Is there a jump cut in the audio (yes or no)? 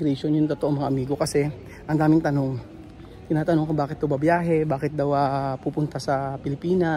no